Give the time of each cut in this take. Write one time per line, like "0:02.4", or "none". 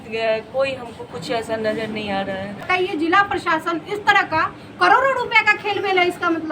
0:02.6